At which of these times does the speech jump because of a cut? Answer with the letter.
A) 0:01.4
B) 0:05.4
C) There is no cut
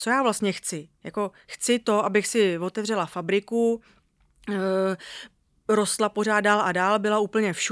C